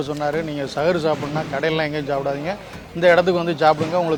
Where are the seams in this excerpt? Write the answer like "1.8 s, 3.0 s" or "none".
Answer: none

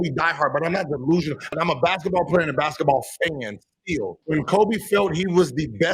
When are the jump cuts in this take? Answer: 1.4 s, 4.2 s

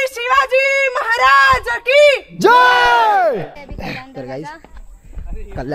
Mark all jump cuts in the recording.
3.5 s

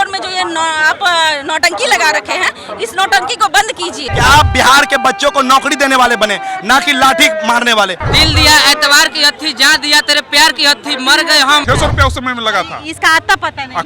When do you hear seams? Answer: 4.0 s, 8.0 s, 11.6 s

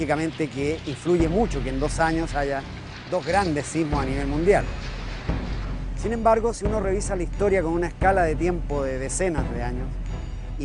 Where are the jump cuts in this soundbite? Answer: 4.9 s

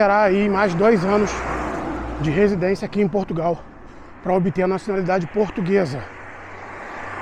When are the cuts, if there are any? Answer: none

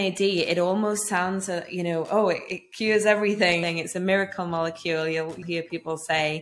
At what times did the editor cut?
3.6 s, 5.4 s

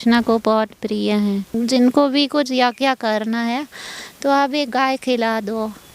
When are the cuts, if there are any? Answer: 1.6 s

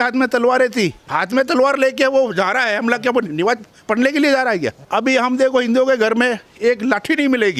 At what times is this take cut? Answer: 1.1 s, 4.8 s

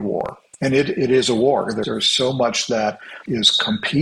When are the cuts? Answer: 1.8 s, 3.1 s

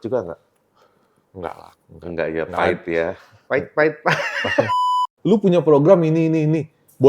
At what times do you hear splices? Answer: 5.0 s

